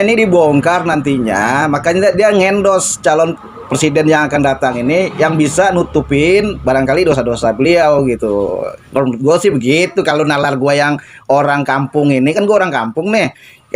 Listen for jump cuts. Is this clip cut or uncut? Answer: uncut